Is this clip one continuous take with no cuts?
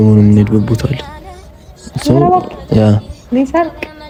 yes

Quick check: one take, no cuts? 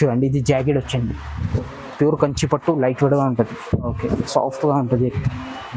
no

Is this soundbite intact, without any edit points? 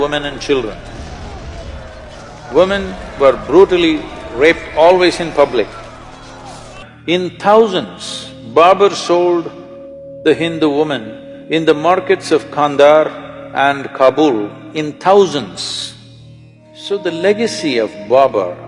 no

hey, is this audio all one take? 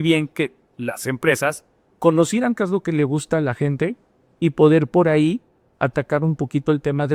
yes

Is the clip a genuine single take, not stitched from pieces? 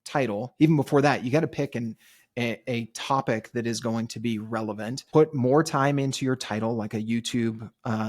no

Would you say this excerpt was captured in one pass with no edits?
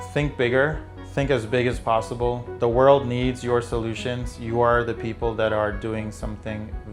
yes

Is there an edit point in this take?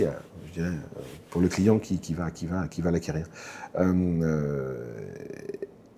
no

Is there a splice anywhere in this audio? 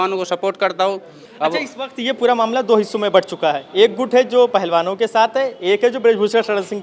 no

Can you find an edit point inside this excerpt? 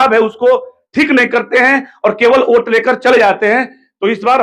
no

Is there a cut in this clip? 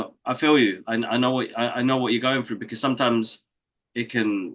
no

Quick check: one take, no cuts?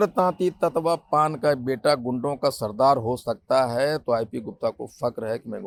yes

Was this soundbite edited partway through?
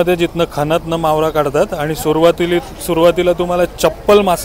no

